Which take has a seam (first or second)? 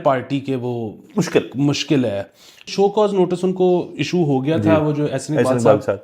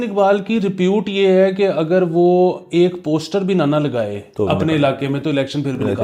first